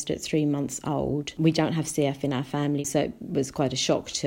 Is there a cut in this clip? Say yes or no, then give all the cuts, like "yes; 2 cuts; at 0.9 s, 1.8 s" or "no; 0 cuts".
yes; 2 cuts; at 1.4 s, 2.9 s